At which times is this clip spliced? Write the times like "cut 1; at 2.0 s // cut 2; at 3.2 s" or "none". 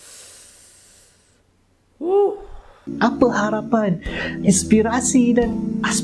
cut 1; at 2.8 s